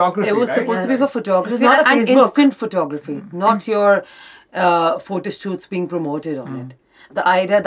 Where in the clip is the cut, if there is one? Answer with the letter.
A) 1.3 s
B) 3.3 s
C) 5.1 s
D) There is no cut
D